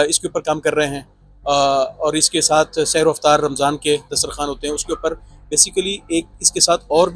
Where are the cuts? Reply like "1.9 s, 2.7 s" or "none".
none